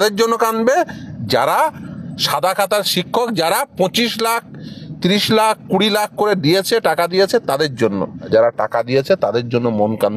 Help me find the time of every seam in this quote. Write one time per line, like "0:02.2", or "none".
0:08.3

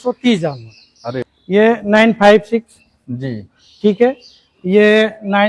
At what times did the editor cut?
0:01.3

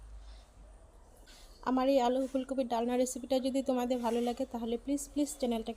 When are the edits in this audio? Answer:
0:01.3

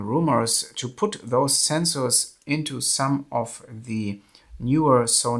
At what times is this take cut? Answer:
none

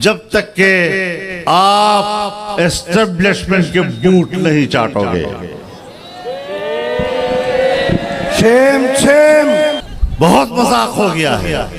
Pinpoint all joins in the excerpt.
0:09.8

